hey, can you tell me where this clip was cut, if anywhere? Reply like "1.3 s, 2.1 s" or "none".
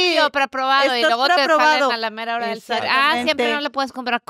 none